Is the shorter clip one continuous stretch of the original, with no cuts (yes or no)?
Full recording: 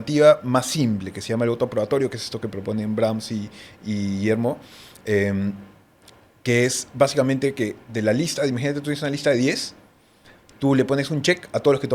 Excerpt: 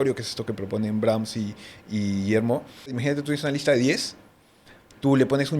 no